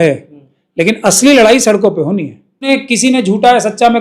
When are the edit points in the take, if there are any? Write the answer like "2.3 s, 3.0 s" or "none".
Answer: 2.7 s